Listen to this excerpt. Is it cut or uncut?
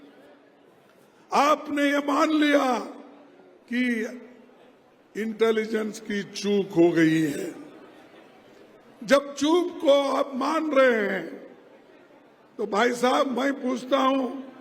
uncut